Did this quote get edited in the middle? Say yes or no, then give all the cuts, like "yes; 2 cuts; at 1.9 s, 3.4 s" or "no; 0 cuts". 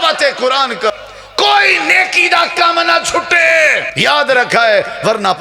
yes; 2 cuts; at 0.9 s, 3.9 s